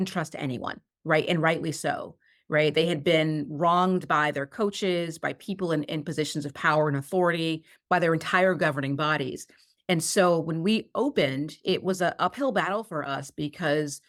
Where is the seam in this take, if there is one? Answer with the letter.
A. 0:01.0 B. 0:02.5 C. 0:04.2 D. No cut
D